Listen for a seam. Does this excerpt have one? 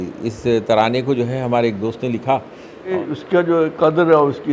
yes; 1 cut; at 2.9 s

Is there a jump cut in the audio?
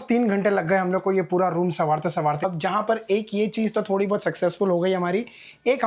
yes; 1 cut; at 2.4 s

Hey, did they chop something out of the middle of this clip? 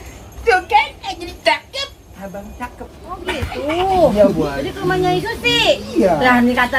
yes; 1 cut; at 3.4 s

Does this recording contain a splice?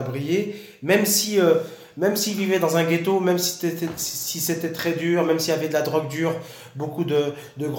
no; 0 cuts

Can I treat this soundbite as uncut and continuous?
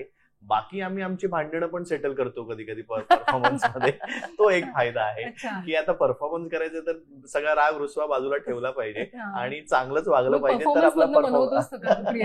yes; 0 cuts

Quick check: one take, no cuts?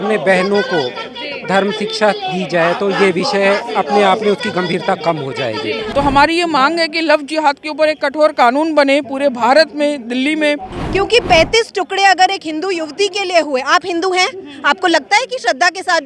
no; 2 cuts; at 5.8 s, 10.7 s

